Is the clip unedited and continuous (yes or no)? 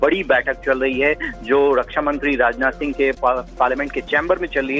yes